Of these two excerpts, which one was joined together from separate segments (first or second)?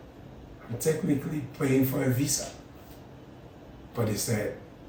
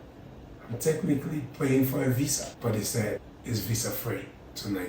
second